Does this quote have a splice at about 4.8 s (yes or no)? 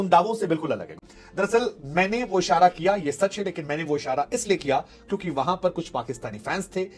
no